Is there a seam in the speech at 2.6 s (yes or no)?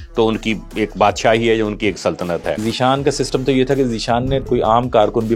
yes